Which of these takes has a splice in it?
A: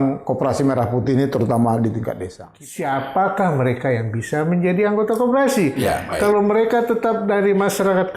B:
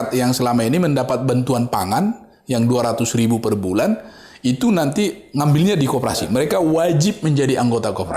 A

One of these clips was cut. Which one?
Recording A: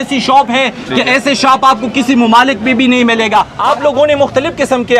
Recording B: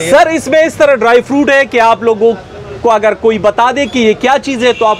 A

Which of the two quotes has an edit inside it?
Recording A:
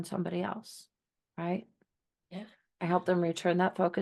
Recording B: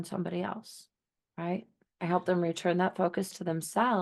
B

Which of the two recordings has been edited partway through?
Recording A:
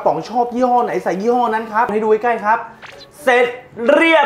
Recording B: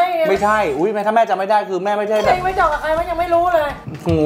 A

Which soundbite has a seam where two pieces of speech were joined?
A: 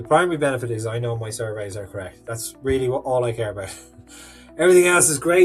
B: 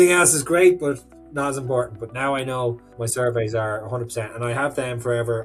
B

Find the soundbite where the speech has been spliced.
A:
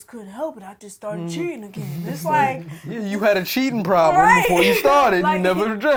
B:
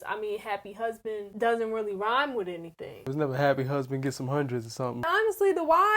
B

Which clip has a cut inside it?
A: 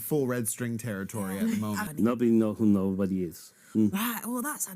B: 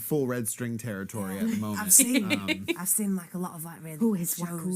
A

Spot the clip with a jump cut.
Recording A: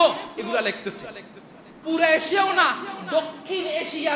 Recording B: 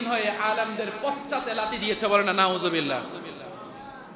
A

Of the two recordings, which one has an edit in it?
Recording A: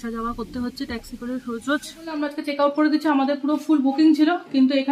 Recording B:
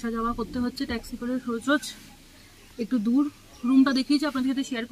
A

